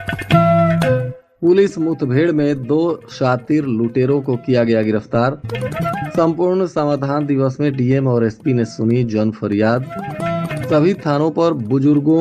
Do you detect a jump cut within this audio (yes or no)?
yes